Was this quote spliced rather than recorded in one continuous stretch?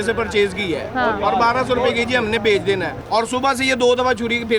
yes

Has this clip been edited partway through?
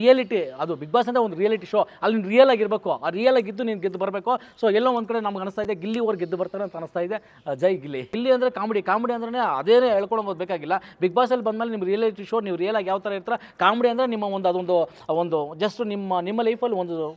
yes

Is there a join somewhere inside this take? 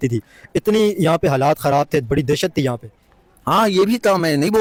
no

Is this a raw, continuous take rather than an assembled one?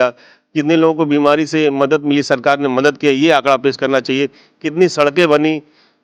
yes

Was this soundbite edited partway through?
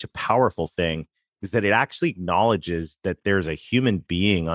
no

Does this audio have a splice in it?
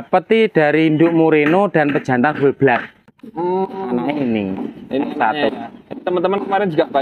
no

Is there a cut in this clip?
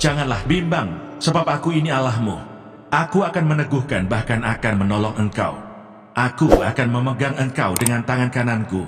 no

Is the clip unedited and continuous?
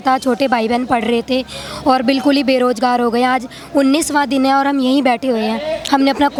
yes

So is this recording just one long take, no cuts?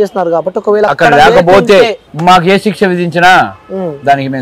no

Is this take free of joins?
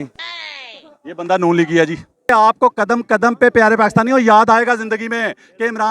no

